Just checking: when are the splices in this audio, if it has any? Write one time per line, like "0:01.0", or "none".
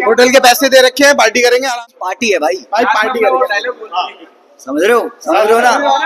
0:01.7